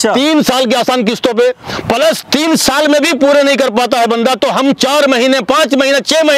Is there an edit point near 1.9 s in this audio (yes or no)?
no